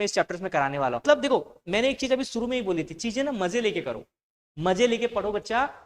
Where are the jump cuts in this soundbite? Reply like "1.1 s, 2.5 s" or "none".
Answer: 1.0 s